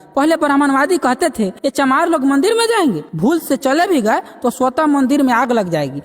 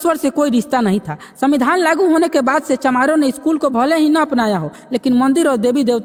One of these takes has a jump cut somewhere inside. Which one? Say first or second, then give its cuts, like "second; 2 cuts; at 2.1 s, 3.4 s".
first; 2 cuts; at 1.6 s, 3.1 s